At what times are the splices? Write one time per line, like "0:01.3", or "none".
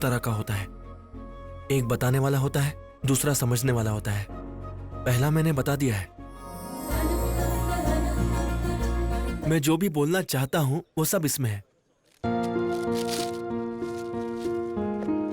0:06.6
0:09.4

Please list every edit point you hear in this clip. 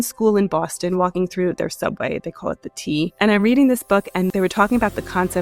0:03.1
0:04.3

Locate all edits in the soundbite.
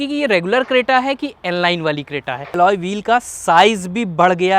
0:02.5

